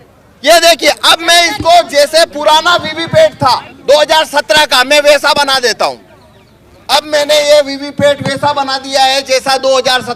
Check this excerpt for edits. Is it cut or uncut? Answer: uncut